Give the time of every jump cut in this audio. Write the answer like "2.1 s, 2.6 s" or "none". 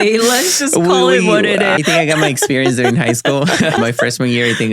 1.8 s, 3.8 s

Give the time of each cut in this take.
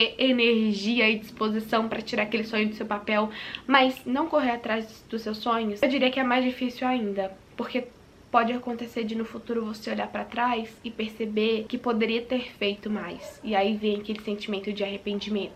none

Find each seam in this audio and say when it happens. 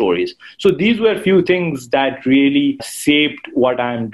2.9 s

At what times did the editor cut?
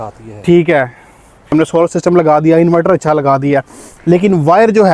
1.5 s

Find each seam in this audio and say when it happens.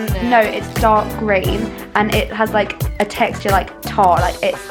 none

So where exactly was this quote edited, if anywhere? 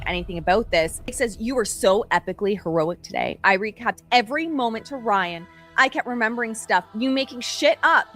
1.1 s

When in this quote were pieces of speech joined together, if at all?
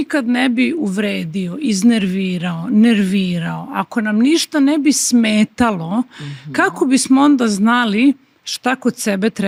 none

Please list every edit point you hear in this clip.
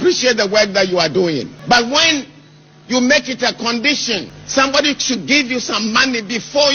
1.6 s, 4.4 s

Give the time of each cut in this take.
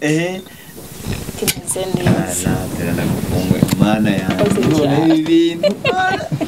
none

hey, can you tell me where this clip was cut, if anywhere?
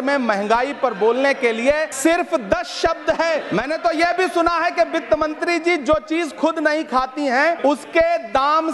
1.9 s, 3.5 s, 7.6 s

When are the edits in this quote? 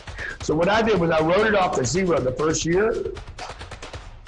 none

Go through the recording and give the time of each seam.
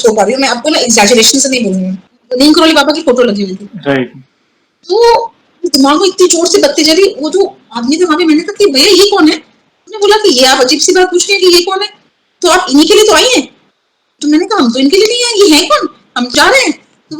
2.1 s

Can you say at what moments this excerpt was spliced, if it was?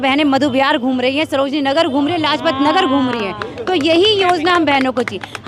none

